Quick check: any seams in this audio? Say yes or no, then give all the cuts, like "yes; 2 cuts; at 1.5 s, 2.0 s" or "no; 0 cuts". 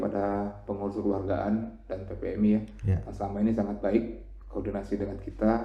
no; 0 cuts